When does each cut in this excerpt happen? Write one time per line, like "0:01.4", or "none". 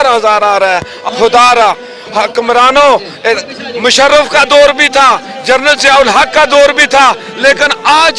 0:01.0